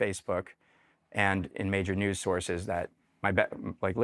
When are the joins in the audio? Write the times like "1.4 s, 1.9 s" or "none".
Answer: none